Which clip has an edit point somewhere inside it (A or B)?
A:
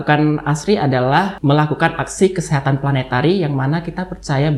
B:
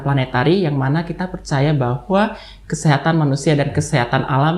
A